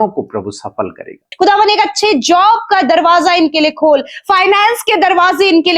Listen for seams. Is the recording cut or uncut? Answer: cut